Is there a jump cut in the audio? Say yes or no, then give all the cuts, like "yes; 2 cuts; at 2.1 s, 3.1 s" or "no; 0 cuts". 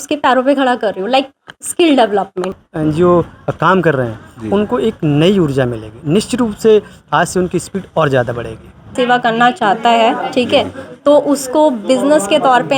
yes; 2 cuts; at 2.5 s, 8.9 s